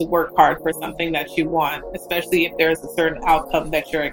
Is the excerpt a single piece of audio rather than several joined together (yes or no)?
yes